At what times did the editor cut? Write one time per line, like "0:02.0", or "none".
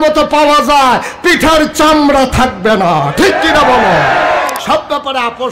0:04.5